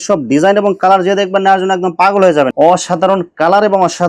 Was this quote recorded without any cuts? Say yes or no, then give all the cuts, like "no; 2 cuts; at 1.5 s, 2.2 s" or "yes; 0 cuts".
no; 1 cut; at 2.5 s